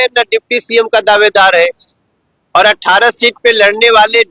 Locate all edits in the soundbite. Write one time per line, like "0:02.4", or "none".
none